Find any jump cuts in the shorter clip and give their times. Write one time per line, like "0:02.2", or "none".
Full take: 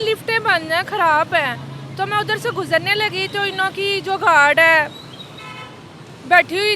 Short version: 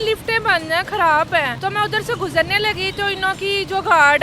0:01.5